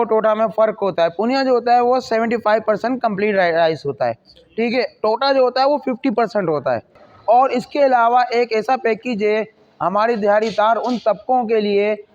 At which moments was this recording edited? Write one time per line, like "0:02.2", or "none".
0:07.1